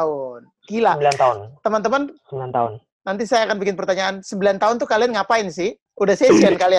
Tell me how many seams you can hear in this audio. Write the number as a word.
one